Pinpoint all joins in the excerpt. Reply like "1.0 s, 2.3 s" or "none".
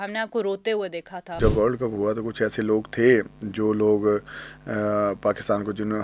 1.4 s